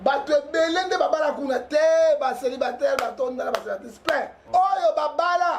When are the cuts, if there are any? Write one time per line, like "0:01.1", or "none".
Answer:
0:04.4